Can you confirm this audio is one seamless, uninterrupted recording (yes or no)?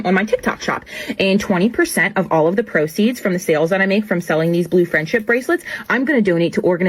yes